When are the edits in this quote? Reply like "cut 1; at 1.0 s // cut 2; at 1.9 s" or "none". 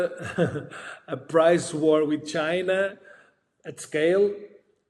none